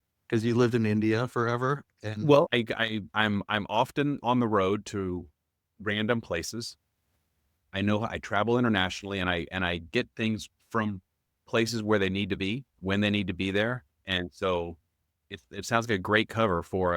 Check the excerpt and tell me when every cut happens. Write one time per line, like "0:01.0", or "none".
0:02.5
0:10.5
0:12.7